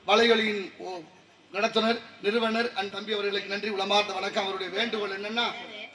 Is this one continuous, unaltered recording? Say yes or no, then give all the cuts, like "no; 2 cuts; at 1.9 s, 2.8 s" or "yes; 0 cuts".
no; 1 cut; at 2.9 s